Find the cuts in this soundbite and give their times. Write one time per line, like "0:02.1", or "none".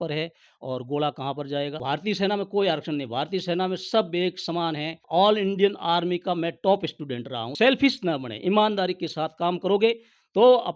0:01.8
0:05.0
0:07.5